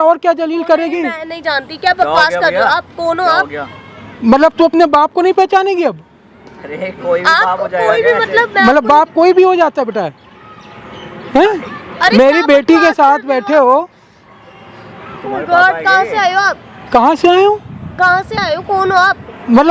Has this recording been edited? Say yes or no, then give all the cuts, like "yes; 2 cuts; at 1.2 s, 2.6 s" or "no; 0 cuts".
no; 0 cuts